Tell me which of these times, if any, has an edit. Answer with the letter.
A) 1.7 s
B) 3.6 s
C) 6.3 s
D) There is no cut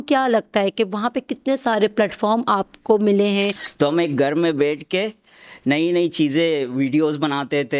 B